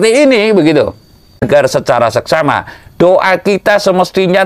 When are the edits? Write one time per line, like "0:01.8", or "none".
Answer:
0:01.4